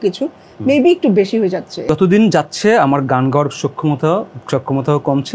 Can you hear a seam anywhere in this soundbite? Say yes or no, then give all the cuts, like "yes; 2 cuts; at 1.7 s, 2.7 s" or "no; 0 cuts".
yes; 1 cut; at 1.9 s